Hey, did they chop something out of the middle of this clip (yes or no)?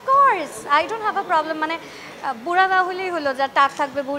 no